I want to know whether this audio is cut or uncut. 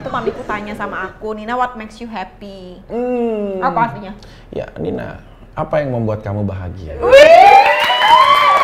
uncut